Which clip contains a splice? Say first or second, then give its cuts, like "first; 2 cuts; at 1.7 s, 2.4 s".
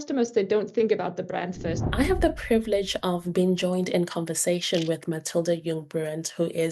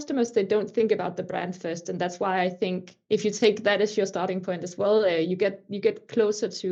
first; 1 cut; at 1.8 s